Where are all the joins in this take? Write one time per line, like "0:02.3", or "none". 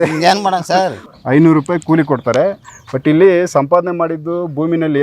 0:01.0